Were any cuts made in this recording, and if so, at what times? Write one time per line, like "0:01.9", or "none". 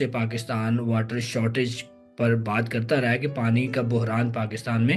none